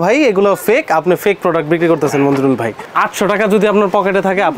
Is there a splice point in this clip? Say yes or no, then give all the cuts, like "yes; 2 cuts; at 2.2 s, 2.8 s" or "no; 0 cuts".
yes; 1 cut; at 2.8 s